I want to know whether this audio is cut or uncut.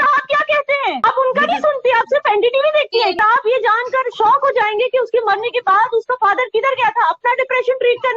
cut